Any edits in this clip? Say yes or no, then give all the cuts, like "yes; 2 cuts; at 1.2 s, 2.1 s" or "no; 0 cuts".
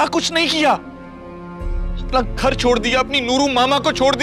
no; 0 cuts